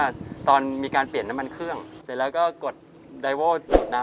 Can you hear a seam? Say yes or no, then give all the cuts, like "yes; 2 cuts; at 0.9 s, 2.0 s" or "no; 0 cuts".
yes; 1 cut; at 2.0 s